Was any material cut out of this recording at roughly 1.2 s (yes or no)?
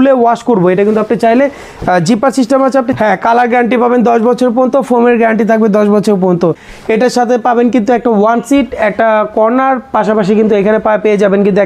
no